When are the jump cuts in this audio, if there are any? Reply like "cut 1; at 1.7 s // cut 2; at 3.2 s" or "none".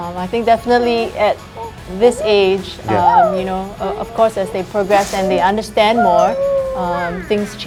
none